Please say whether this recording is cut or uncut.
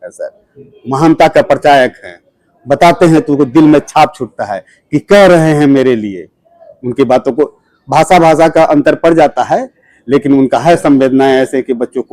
uncut